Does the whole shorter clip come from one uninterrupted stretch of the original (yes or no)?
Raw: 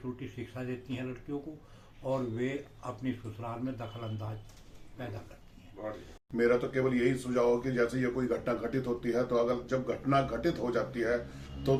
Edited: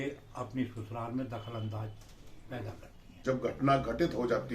no